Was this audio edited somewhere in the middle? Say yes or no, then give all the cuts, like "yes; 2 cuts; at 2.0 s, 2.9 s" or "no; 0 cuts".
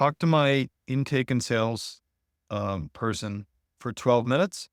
no; 0 cuts